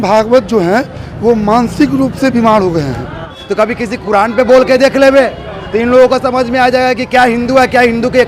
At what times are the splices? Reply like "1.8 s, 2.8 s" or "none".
3.3 s